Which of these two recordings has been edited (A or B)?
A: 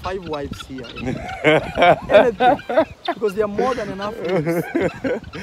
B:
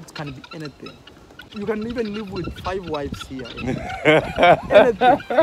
B